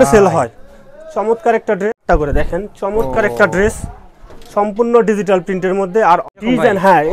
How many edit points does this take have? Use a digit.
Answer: 2